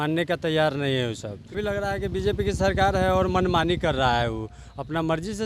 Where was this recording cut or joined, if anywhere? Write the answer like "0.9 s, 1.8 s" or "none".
1.6 s